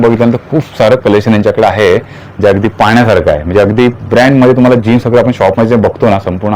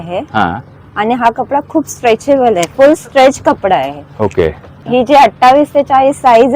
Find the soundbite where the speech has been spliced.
second; 1 cut; at 4.7 s

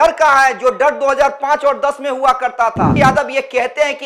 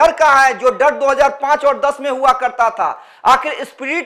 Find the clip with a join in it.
first; 1 cut; at 2.9 s

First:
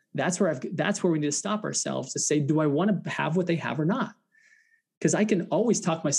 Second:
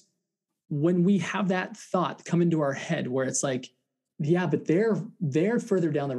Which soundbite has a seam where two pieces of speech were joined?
second; 1 cut; at 4.0 s

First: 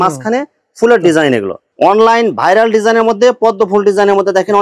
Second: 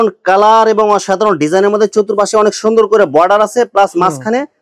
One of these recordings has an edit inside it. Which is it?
first; 1 cut; at 1.6 s

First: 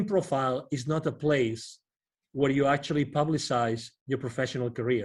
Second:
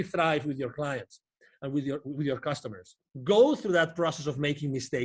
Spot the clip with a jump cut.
second; 1 cut; at 3.1 s

